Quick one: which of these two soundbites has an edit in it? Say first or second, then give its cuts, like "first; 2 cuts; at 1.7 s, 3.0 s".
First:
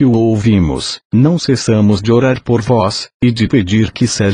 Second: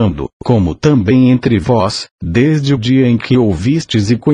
second; 1 cut; at 2.8 s